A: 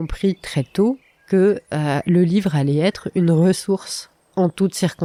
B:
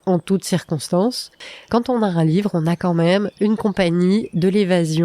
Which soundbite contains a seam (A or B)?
B